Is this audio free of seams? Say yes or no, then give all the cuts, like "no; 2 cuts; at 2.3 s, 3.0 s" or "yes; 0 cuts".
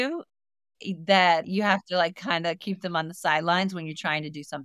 no; 1 cut; at 1.5 s